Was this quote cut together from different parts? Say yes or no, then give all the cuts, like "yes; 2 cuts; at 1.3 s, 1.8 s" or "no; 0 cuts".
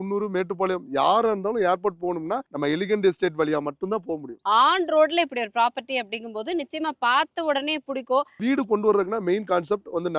yes; 3 cuts; at 2.5 s, 4.3 s, 8.4 s